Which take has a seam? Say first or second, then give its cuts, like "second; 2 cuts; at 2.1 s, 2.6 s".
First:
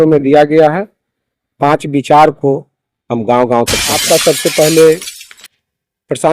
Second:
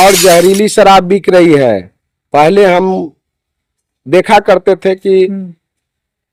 first; 1 cut; at 3.9 s